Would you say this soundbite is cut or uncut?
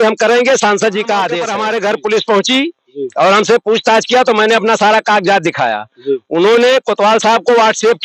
cut